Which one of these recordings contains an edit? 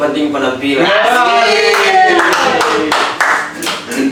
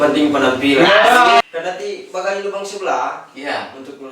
second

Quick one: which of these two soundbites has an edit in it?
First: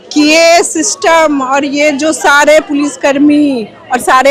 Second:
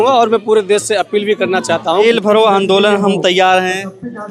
second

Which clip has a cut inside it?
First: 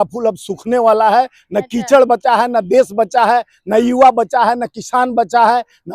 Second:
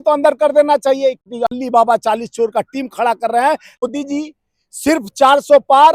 second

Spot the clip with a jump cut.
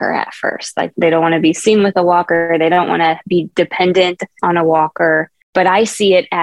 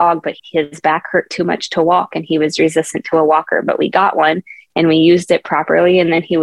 first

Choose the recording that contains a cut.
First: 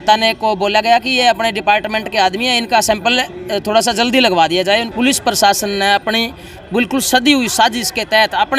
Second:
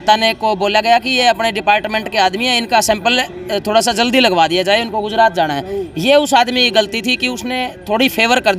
first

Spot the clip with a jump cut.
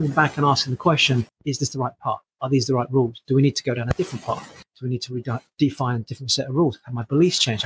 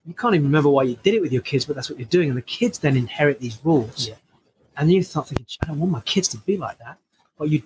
first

